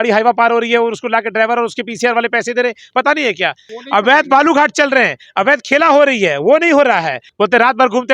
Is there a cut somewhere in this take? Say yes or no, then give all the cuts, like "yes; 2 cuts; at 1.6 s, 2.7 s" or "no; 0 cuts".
yes; 2 cuts; at 3.7 s, 7.2 s